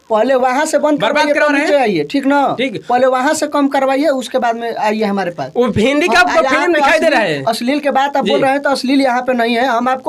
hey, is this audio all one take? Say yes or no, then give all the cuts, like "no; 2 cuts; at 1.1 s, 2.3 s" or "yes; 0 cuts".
yes; 0 cuts